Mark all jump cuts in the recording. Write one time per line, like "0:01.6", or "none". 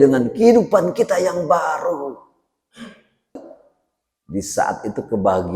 0:03.3